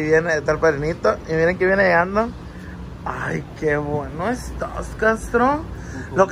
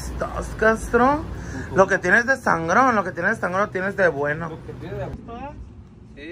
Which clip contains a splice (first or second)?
second